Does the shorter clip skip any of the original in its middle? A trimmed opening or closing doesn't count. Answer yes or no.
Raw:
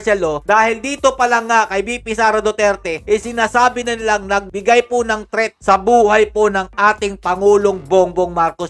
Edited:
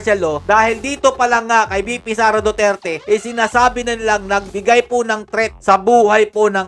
no